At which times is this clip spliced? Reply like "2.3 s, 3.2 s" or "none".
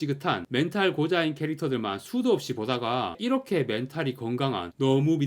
3.2 s

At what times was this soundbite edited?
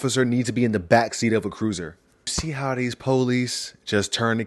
2.3 s

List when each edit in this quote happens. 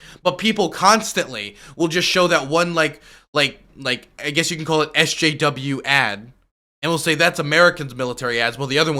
none

